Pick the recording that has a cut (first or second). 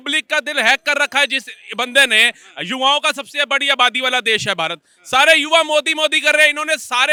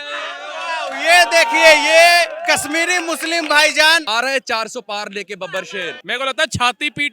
second